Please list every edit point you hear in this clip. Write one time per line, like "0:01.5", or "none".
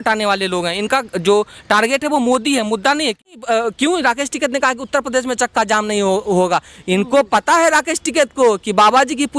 0:03.3